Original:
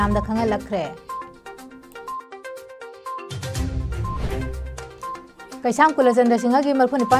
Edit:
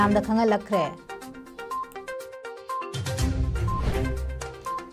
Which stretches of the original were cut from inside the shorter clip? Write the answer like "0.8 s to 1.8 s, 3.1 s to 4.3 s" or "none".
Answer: 1.0 s to 1.3 s